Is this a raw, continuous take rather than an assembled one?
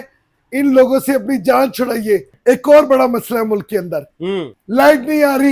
no; 2 cuts; at 2.3 s, 4.6 s

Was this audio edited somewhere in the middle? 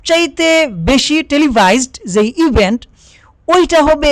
no; 0 cuts

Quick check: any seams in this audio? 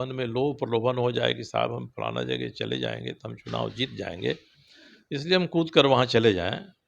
no; 0 cuts

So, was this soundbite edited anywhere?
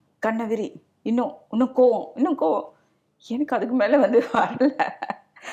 no; 0 cuts

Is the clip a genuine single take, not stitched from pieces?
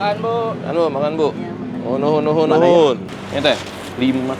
no; 1 cut; at 3.1 s

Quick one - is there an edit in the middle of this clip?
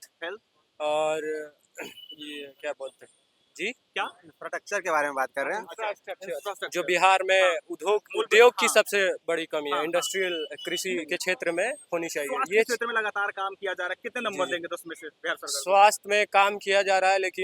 no; 0 cuts

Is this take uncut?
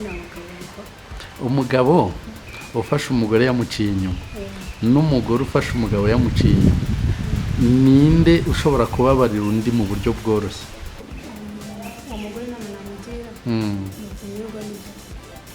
no; 1 cut; at 11.1 s

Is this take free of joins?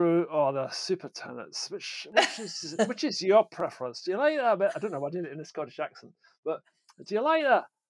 yes; 0 cuts

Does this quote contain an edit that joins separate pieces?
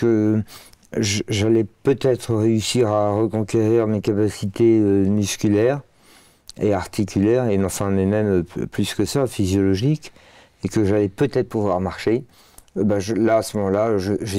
no; 0 cuts

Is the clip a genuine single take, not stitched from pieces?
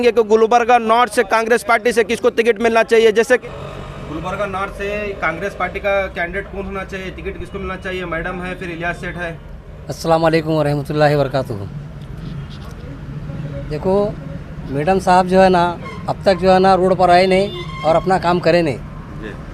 yes; 0 cuts

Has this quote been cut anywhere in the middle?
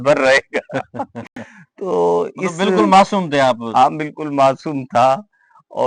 no; 0 cuts

